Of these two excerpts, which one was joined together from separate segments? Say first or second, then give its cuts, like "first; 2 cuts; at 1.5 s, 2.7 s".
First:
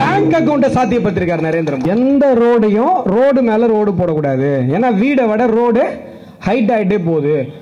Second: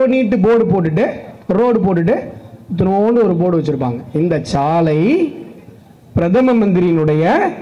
first; 1 cut; at 1.9 s